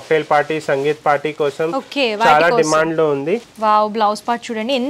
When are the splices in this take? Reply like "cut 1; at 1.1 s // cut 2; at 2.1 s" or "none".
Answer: cut 1; at 3.5 s